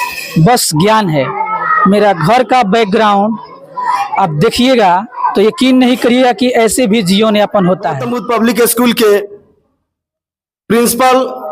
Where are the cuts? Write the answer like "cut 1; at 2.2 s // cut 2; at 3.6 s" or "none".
cut 1; at 8.2 s